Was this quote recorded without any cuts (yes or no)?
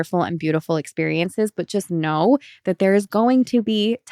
yes